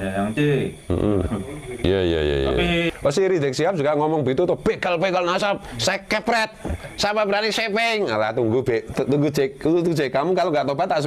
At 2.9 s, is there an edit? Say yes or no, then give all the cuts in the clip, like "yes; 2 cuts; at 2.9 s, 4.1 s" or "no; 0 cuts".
yes; 1 cut; at 2.9 s